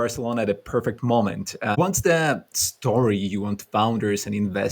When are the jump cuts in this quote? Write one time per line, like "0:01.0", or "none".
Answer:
0:01.8